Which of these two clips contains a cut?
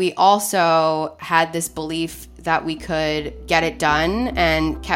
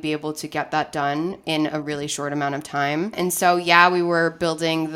second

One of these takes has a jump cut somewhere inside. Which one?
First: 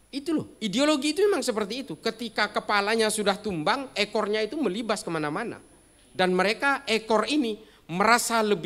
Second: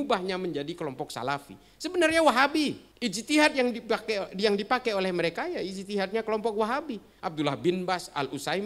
second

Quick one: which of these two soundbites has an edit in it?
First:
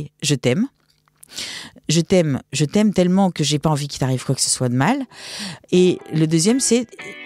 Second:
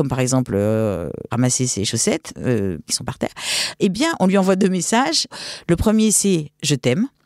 second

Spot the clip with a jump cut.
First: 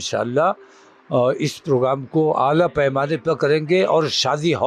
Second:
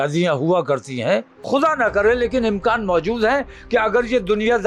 second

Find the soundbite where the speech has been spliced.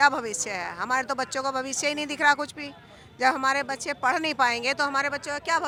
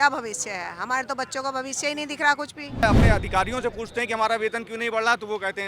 second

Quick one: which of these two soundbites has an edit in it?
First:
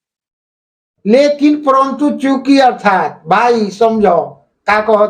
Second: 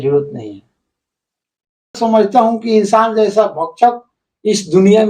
second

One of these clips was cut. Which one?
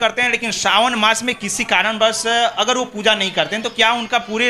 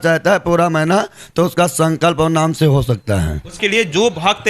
second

